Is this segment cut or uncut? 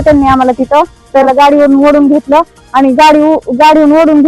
cut